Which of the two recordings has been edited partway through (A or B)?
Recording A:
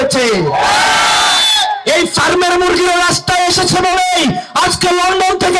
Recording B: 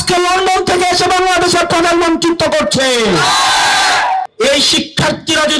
B